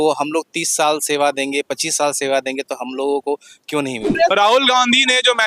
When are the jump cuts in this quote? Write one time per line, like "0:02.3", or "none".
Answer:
0:04.1